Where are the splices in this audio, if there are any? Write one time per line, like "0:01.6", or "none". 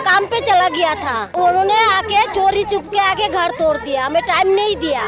0:01.4